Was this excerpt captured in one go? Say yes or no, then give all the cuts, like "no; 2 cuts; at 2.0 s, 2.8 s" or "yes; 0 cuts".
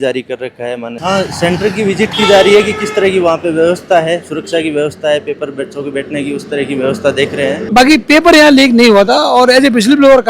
no; 2 cuts; at 0.9 s, 7.7 s